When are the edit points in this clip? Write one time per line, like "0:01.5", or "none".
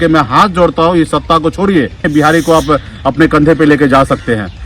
0:02.1